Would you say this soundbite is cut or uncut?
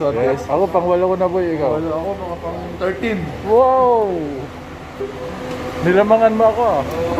uncut